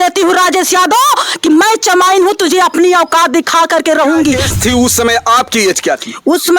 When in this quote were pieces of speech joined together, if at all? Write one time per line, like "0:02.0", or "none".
0:04.5